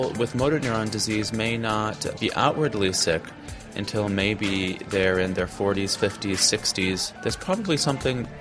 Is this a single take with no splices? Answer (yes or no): no